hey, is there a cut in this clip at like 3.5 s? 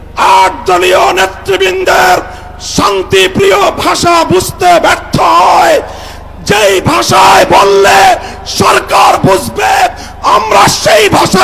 no; 0 cuts

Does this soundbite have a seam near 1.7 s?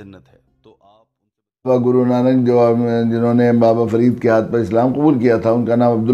yes; 1 cut; at 1.7 s

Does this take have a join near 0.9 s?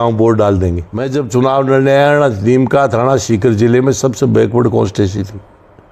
yes; 1 cut; at 0.9 s

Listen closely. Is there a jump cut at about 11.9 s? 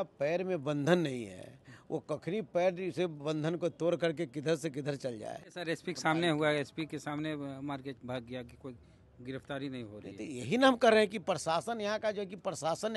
no; 1 cut; at 5.6 s

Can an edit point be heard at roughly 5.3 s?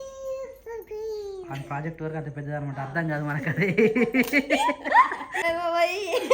yes; 1 cut; at 5.3 s

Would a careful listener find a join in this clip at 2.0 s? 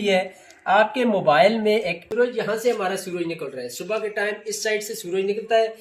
yes; 1 cut; at 2.0 s

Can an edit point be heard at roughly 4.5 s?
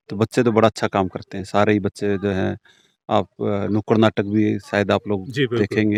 no; 0 cuts

